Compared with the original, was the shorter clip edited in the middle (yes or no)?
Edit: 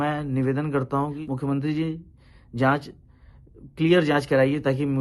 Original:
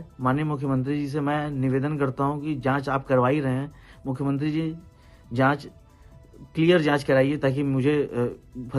yes